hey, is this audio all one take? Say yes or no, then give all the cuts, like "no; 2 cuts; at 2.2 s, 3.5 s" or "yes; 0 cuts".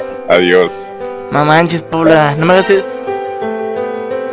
no; 1 cut; at 2.9 s